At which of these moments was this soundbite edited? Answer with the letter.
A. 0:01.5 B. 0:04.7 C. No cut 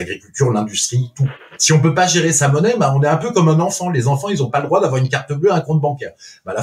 A